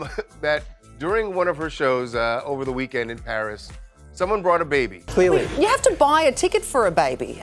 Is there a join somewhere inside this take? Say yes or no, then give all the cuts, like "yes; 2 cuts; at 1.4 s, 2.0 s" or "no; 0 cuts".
no; 0 cuts